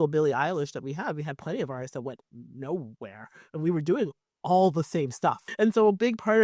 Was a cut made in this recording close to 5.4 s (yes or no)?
yes